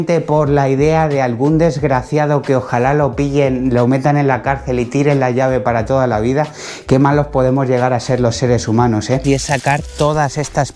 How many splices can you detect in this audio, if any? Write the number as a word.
one